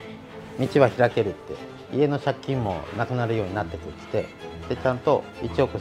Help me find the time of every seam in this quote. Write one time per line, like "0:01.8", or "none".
0:04.5

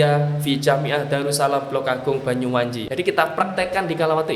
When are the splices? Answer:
0:02.8

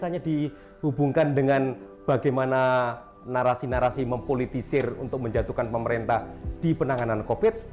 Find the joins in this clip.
none

